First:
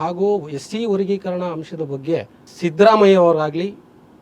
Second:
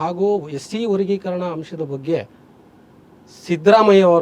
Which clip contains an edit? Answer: first; 1 cut; at 2.4 s

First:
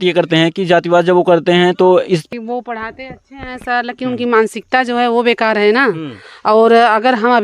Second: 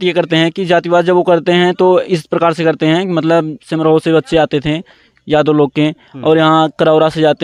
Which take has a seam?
first; 1 cut; at 2.3 s

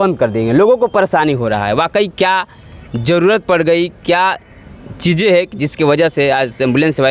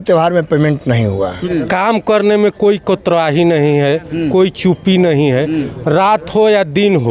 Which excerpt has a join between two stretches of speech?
second; 1 cut; at 1.4 s

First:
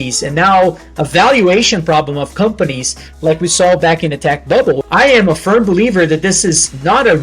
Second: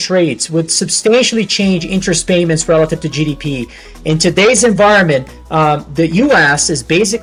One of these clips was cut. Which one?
first; 1 cut; at 4.9 s

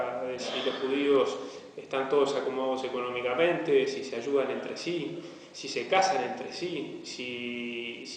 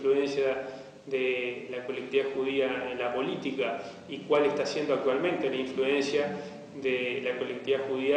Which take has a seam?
first; 1 cut; at 5.2 s

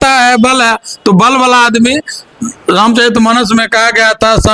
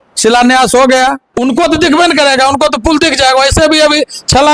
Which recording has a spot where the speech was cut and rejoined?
second; 1 cut; at 1.3 s

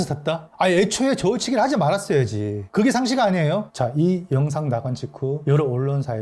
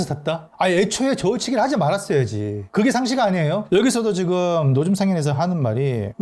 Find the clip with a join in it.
first; 1 cut; at 3.6 s

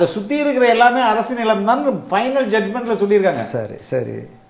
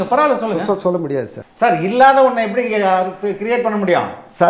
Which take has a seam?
second; 1 cut; at 1.3 s

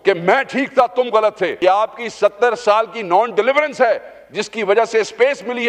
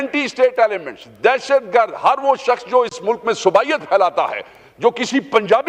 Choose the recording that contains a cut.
first; 1 cut; at 1.5 s

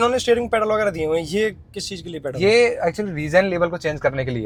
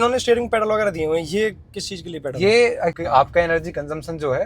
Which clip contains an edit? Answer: second; 1 cut; at 3.0 s

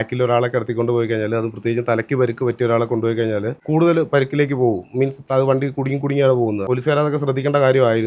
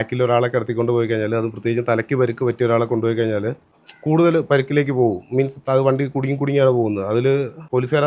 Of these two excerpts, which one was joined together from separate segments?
first; 2 cuts; at 3.6 s, 6.6 s

